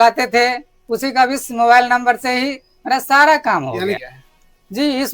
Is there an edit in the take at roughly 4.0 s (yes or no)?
yes